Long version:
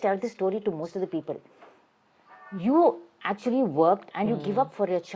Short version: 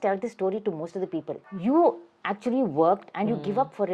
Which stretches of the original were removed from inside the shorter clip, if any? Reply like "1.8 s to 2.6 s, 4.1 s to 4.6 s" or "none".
1.5 s to 2.5 s